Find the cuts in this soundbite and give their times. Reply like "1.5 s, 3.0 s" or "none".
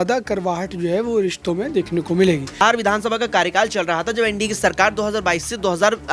2.6 s